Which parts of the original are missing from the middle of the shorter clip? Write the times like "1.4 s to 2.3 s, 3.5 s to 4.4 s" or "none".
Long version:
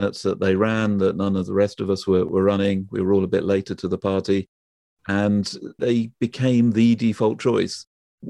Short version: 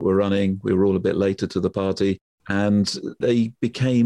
4.6 s to 4.9 s